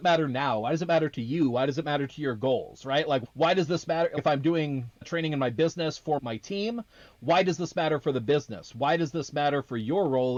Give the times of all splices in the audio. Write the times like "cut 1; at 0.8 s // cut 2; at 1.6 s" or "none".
none